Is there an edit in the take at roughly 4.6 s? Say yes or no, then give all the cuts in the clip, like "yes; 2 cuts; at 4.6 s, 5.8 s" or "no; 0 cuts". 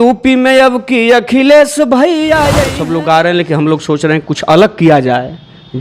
no; 1 cut; at 2.7 s